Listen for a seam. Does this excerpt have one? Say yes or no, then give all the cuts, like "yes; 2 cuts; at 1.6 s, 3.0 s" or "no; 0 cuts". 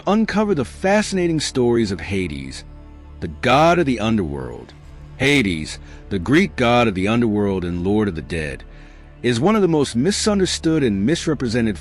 yes; 1 cut; at 4.0 s